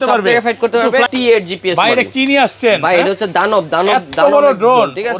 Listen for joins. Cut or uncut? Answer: cut